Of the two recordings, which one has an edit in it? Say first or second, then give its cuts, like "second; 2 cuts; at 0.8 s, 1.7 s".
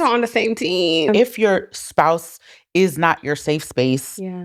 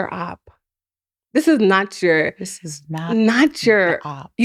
first; 1 cut; at 1.1 s